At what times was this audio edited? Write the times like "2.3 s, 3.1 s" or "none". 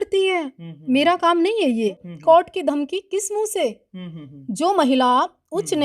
2.1 s